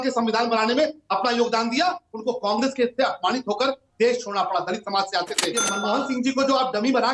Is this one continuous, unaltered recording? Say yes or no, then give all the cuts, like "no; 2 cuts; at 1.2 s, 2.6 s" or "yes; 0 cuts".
no; 1 cut; at 5.7 s